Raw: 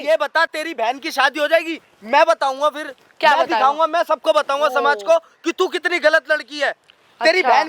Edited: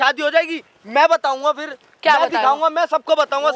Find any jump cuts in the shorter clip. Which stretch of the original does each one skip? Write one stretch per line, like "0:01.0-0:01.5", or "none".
none